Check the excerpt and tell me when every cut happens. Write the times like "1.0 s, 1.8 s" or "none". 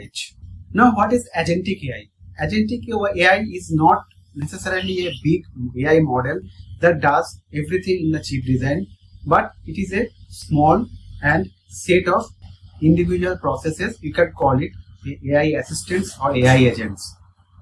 none